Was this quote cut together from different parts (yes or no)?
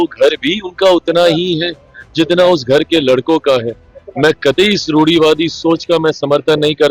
no